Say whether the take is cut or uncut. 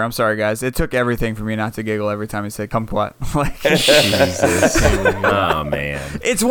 uncut